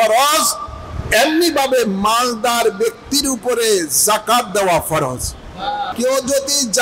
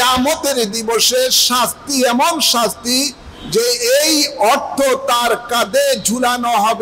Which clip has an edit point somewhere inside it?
first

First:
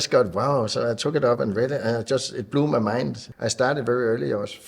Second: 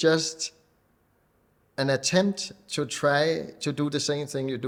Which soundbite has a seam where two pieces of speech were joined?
first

